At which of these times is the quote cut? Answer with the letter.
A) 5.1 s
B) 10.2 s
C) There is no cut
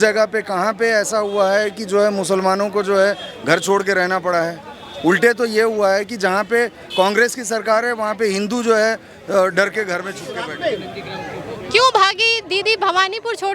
B